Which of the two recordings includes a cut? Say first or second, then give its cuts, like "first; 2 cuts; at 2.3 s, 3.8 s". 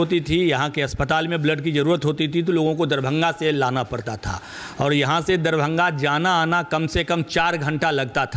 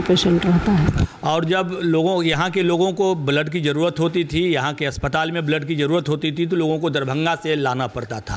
second; 1 cut; at 1.0 s